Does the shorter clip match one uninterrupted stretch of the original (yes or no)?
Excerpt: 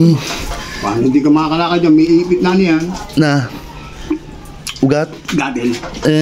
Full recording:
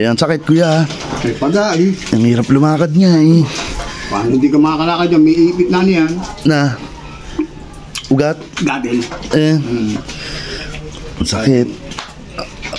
yes